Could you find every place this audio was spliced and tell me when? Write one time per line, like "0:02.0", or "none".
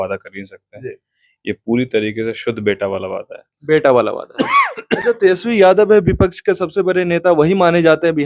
none